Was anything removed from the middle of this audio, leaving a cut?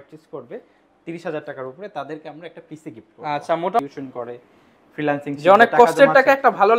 yes; 1 cut; at 3.8 s

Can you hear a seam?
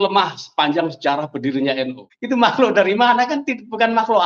yes; 1 cut; at 2.1 s

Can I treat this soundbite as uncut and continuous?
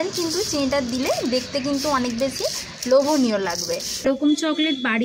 no; 1 cut; at 4.0 s

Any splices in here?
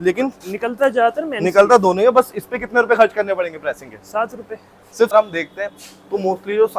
yes; 1 cut; at 5.1 s

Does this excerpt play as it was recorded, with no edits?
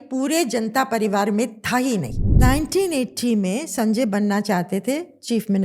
no; 1 cut; at 2.2 s

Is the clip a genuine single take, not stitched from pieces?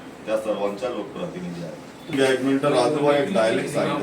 no; 1 cut; at 2.1 s

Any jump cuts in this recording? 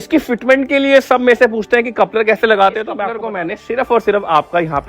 yes; 1 cut; at 3.1 s

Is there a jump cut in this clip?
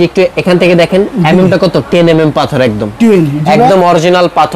no; 0 cuts

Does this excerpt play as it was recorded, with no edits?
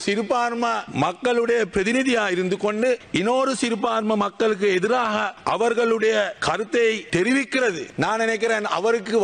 no; 5 cuts; at 0.8 s, 3.0 s, 5.3 s, 6.4 s, 7.4 s

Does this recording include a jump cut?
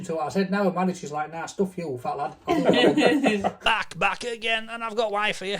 yes; 1 cut; at 3.7 s

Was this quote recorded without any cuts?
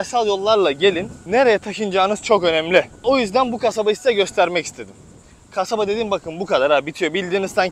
no; 2 cuts; at 1.1 s, 3.0 s

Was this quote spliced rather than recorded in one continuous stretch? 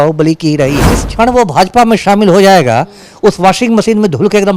yes; 1 cut; at 1.0 s

